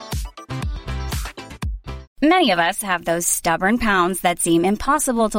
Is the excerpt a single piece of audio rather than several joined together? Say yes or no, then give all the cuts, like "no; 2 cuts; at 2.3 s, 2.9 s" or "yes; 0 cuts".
no; 1 cut; at 2.0 s